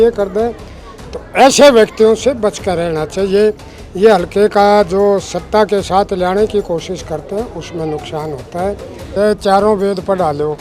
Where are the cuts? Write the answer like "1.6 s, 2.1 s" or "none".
9.0 s